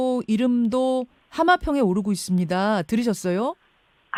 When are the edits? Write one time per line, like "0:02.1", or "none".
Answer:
none